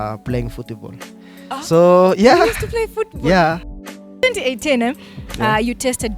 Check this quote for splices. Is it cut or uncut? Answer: cut